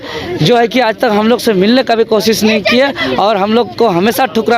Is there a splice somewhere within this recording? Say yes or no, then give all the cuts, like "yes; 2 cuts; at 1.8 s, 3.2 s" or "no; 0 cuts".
no; 0 cuts